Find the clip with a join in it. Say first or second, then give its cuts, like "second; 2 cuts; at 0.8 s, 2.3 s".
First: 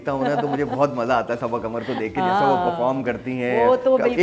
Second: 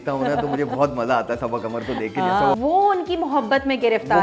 second; 1 cut; at 2.5 s